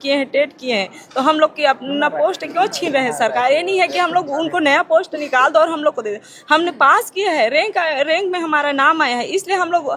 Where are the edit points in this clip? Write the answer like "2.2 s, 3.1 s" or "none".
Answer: none